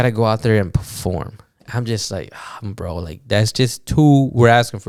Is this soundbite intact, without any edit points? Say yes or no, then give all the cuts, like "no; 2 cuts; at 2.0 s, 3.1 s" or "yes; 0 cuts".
yes; 0 cuts